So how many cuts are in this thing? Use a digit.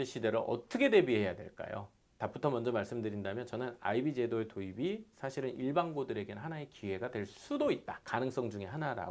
0